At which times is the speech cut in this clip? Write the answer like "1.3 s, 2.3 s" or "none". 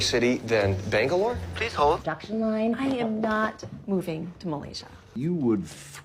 2.1 s